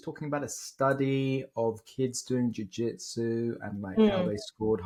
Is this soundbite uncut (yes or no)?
yes